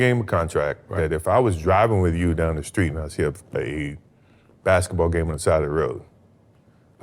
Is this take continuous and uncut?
yes; 0 cuts

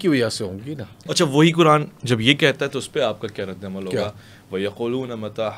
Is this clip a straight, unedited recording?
no; 1 cut; at 1.0 s

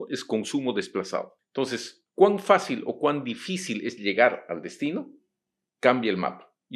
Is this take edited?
yes; 1 cut; at 1.4 s

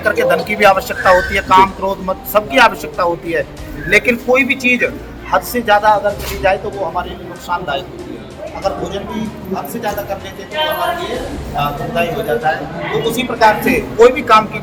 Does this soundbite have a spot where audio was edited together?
no; 0 cuts

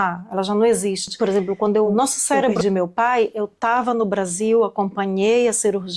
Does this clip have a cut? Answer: yes; 1 cut; at 1.1 s

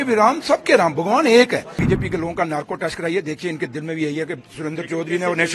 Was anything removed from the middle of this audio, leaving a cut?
yes; 1 cut; at 1.8 s

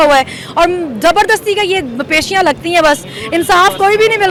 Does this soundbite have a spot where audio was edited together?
no; 0 cuts

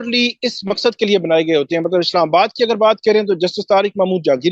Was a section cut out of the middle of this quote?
no; 0 cuts

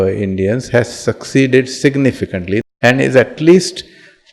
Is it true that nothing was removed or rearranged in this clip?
no; 1 cut; at 2.6 s

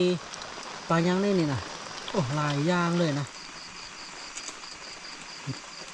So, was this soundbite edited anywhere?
yes; 1 cut; at 3.4 s

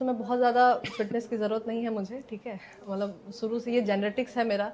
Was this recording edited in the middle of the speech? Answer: no; 0 cuts

